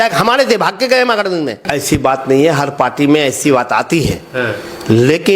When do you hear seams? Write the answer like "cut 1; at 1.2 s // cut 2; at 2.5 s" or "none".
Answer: cut 1; at 1.6 s